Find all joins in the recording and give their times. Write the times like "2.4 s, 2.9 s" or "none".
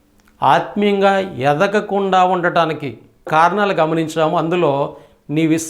3.3 s